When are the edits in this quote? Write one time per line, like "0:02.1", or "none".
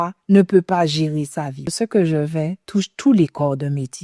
0:01.7